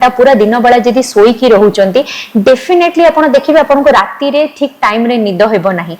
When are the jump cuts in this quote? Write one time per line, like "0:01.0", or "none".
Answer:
none